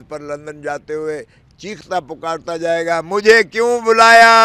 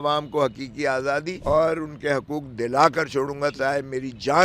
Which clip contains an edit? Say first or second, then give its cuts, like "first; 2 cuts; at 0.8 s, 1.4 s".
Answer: second; 1 cut; at 1.3 s